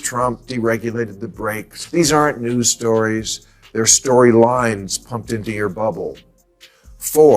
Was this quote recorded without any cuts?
no; 1 cut; at 1.8 s

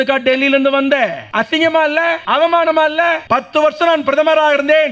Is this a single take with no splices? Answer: no; 3 cuts; at 1.2 s, 2.2 s, 3.2 s

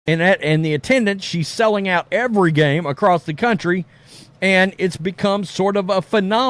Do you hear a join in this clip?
no; 0 cuts

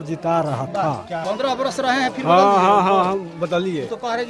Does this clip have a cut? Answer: yes; 1 cut; at 1.1 s

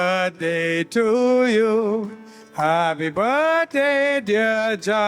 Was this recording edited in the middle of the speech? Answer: no; 0 cuts

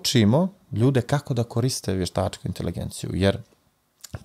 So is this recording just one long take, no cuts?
yes; 0 cuts

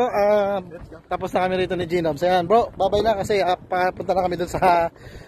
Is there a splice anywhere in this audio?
no; 0 cuts

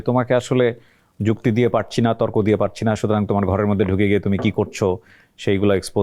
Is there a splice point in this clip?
no; 0 cuts

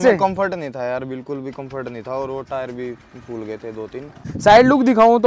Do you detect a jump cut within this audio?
yes; 1 cut; at 4.3 s

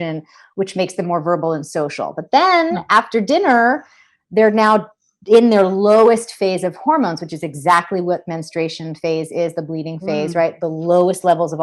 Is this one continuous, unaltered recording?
yes; 0 cuts

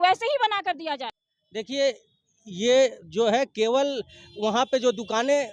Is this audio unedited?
no; 1 cut; at 1.2 s

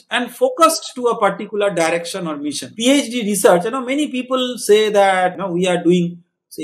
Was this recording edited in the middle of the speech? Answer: yes; 1 cut; at 2.7 s

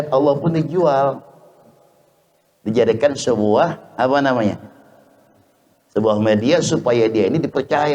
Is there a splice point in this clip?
no; 0 cuts

